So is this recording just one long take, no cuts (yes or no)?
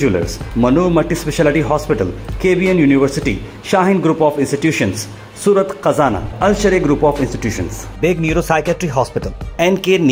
yes